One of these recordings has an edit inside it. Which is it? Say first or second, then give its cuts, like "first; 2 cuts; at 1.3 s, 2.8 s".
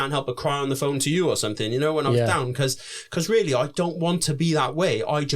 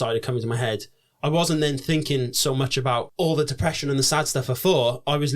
second; 1 cut; at 3.1 s